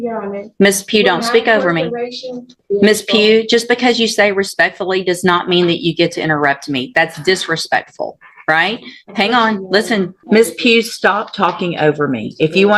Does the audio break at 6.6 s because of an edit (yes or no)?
no